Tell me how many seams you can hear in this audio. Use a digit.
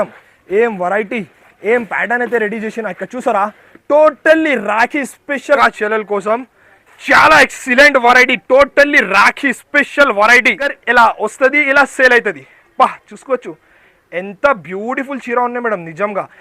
2